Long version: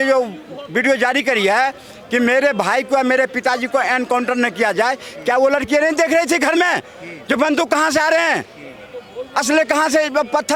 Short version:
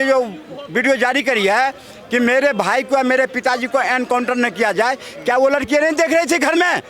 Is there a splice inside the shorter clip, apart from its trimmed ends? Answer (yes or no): no